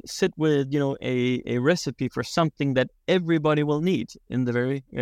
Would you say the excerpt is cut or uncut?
uncut